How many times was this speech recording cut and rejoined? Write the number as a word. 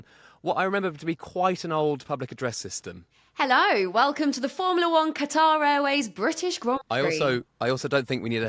one